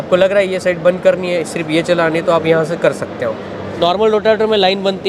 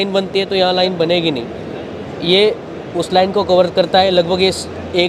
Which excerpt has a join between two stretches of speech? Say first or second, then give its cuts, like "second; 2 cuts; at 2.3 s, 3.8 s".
first; 1 cut; at 3.7 s